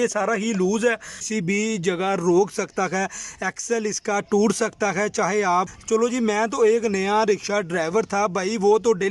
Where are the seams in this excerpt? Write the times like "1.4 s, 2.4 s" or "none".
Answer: 1.2 s, 5.8 s